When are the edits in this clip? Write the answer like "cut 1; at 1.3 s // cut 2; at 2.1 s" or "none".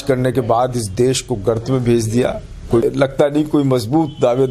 cut 1; at 2.8 s